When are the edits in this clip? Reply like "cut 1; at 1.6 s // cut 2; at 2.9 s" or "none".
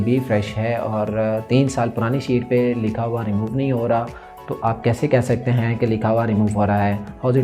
none